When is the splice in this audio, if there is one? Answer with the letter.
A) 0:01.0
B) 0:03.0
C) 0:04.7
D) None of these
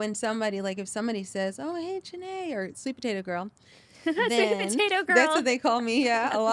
D